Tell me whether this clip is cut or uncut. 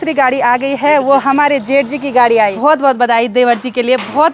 cut